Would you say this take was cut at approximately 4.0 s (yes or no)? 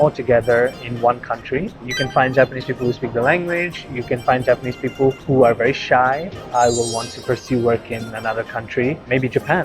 no